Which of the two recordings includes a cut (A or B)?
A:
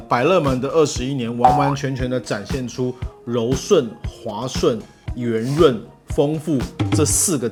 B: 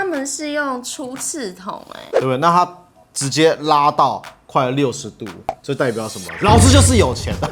B